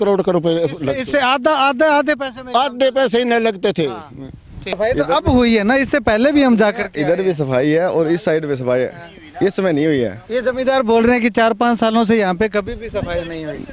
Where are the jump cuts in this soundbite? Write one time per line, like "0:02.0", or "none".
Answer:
0:04.8